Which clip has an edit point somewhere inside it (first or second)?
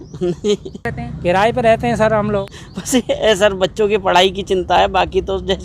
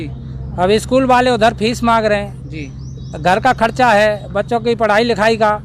first